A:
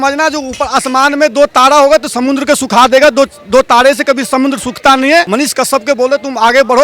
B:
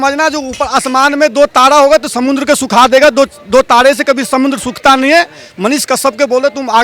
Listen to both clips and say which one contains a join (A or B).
A